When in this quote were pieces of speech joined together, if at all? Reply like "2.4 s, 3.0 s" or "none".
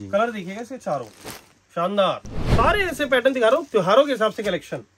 2.4 s, 3.6 s